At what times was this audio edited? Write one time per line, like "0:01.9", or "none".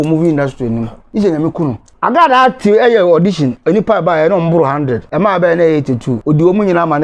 0:01.0
0:01.9
0:05.0
0:06.1